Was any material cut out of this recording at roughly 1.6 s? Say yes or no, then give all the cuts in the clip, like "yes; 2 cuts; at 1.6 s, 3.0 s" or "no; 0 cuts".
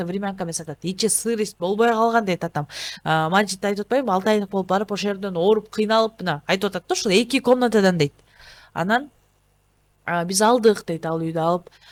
no; 0 cuts